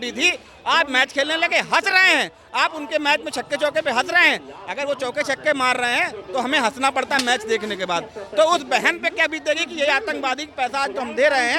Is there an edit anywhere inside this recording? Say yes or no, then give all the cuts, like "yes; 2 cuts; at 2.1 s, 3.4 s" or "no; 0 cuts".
no; 0 cuts